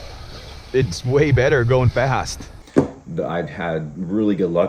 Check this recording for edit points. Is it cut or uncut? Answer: cut